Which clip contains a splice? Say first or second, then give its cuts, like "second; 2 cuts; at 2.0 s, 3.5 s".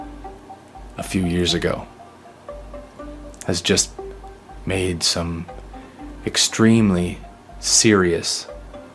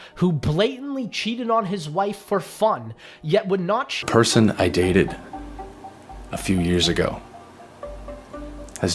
second; 1 cut; at 3.9 s